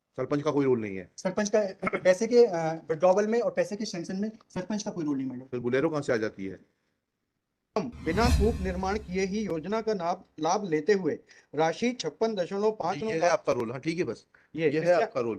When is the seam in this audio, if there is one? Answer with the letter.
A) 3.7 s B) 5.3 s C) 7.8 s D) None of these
C